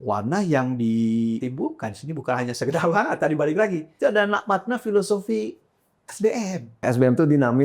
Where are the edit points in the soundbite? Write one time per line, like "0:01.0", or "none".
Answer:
0:01.4
0:03.9
0:06.8